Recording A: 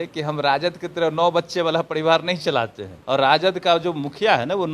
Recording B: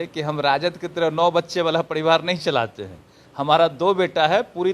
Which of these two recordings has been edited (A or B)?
A